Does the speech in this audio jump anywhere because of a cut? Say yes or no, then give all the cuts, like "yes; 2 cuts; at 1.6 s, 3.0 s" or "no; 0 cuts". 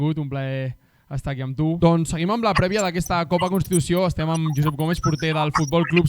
yes; 1 cut; at 1.8 s